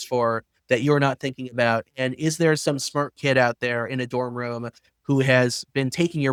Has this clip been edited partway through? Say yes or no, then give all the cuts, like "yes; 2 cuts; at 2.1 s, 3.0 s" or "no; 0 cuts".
no; 0 cuts